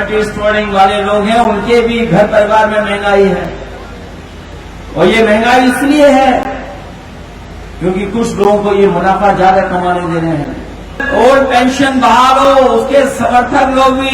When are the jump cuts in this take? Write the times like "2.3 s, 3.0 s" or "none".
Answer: 11.0 s